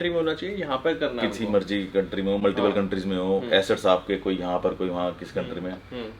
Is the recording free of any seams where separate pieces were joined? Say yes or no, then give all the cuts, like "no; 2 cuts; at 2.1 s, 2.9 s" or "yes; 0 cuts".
yes; 0 cuts